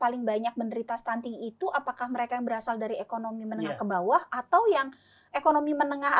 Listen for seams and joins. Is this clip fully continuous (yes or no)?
yes